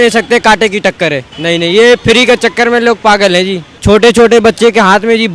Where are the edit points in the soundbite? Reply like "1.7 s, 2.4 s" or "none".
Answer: 1.3 s, 3.7 s